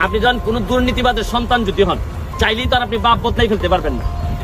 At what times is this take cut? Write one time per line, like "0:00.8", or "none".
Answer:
none